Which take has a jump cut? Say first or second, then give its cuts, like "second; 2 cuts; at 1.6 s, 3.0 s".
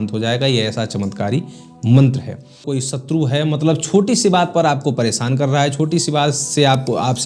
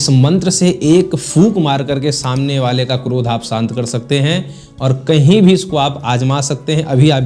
first; 1 cut; at 2.6 s